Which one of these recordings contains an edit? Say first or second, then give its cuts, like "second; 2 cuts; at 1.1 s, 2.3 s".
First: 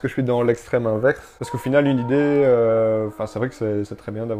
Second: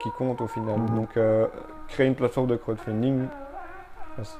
first; 1 cut; at 1.3 s